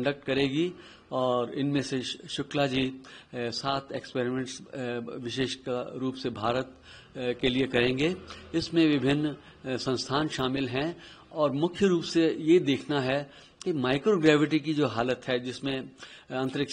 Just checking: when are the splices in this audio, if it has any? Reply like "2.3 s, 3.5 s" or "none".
none

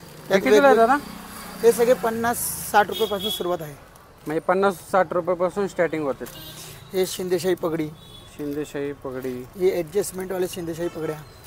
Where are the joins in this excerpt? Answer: none

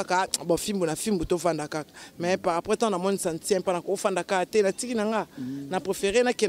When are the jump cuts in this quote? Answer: none

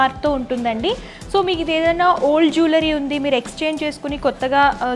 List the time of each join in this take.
none

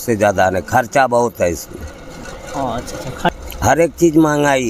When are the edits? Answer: 3.3 s

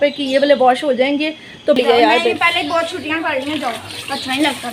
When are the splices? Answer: 1.8 s

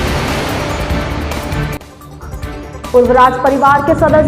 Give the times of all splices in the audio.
2.9 s

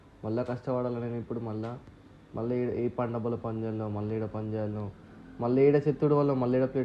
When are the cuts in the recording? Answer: none

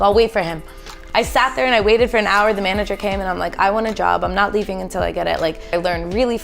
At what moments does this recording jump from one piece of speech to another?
1.0 s, 5.7 s

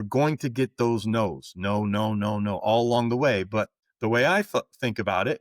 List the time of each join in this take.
3.8 s

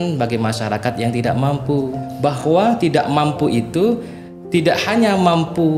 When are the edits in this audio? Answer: 2.1 s

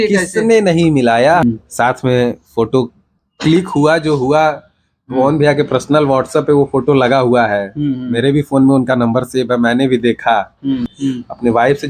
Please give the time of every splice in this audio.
1.4 s, 10.9 s

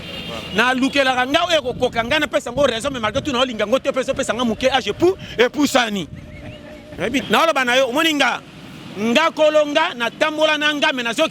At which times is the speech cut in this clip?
7.2 s

